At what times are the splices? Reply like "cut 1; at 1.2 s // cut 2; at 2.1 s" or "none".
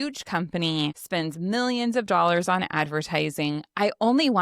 cut 1; at 1.0 s